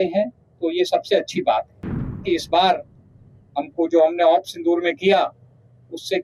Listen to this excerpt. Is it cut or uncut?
cut